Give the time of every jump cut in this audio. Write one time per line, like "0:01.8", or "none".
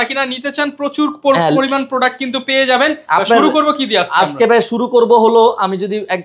none